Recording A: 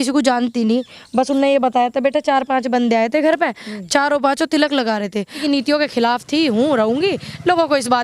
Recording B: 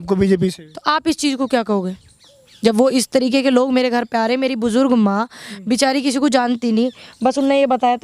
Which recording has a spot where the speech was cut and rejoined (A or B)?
A